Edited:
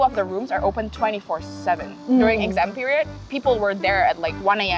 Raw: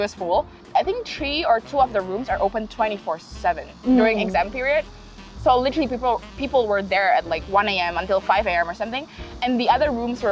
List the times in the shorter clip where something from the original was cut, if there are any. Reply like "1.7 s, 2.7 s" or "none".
3.2 s